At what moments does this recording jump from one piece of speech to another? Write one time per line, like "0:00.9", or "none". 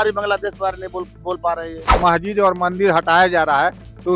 0:01.9